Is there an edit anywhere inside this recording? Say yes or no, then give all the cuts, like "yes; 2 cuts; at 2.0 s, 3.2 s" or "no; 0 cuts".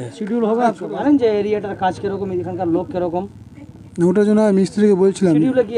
yes; 1 cut; at 1.0 s